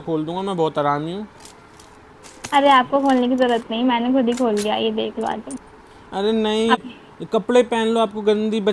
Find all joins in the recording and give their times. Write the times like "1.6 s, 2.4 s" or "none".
6.8 s

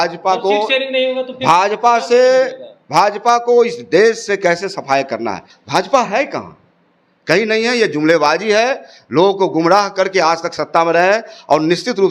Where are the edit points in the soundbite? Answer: 5.5 s

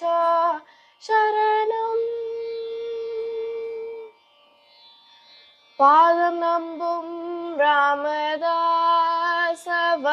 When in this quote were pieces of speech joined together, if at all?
none

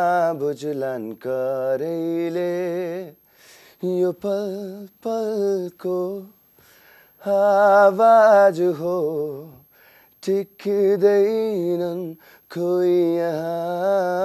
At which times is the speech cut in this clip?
none

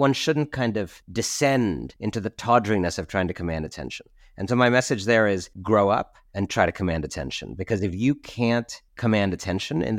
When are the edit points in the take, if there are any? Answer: 1.0 s, 1.9 s, 5.5 s, 6.2 s, 8.8 s

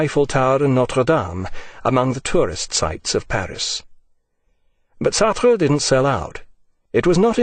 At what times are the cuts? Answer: 3.6 s

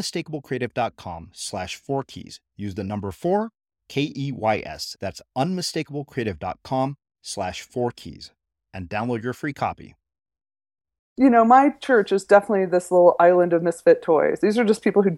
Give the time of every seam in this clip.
11.0 s

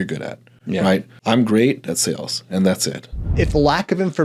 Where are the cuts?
1.1 s, 3.3 s

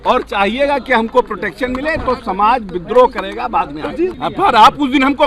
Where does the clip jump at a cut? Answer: 4.1 s

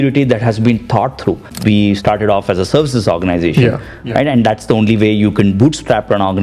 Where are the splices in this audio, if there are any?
1.5 s

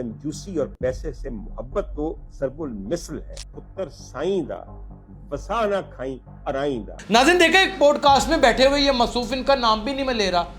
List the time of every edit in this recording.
none

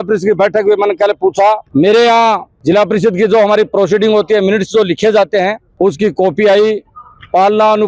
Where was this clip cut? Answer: none

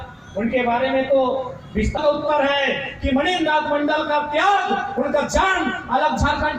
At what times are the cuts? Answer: 2.0 s

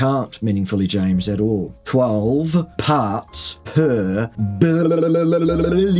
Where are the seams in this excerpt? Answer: none

